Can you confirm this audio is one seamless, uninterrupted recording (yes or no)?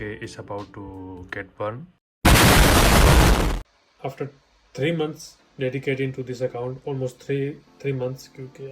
yes